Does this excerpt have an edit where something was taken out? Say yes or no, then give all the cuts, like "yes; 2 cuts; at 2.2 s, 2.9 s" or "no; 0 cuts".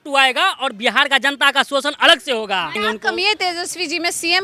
yes; 1 cut; at 2.8 s